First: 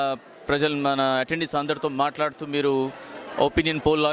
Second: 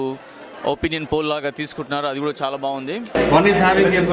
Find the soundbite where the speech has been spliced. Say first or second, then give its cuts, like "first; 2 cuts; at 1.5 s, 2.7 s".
second; 1 cut; at 3.2 s